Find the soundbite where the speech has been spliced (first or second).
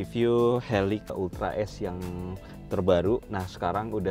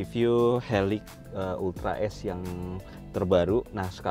first